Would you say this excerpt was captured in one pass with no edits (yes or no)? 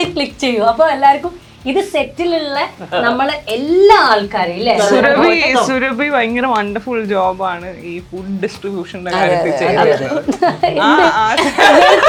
yes